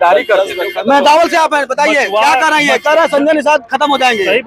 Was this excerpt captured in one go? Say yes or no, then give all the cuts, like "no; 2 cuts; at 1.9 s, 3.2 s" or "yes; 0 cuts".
yes; 0 cuts